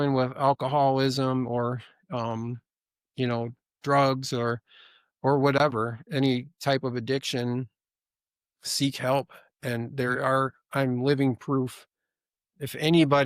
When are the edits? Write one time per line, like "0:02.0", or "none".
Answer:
none